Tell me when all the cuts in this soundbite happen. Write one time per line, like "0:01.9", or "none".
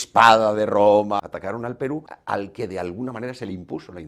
0:01.1
0:02.1